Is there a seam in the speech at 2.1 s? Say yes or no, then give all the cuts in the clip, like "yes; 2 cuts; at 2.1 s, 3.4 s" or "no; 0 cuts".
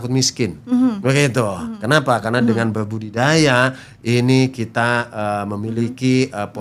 no; 0 cuts